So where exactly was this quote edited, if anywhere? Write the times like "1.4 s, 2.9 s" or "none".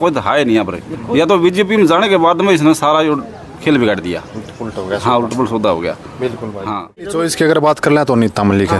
7.1 s